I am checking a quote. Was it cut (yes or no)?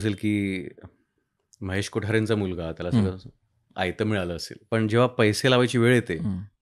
yes